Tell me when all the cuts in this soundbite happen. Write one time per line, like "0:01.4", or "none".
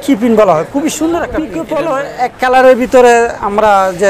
0:01.6